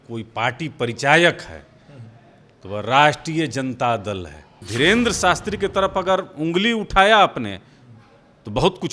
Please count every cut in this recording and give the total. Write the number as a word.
one